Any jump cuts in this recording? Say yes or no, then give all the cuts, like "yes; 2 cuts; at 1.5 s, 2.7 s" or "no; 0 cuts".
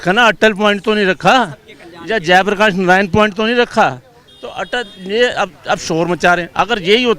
no; 0 cuts